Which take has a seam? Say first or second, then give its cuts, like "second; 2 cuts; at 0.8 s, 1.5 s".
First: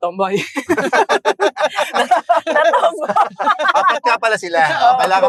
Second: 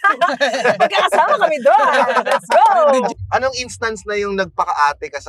second; 1 cut; at 3.1 s